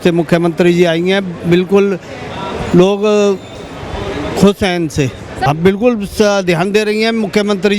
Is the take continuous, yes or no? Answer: no